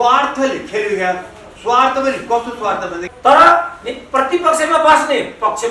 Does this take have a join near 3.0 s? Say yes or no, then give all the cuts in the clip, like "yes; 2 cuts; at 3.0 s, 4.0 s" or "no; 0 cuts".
yes; 1 cut; at 3.0 s